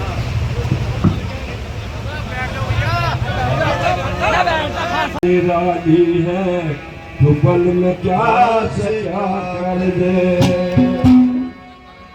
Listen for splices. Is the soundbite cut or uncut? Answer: uncut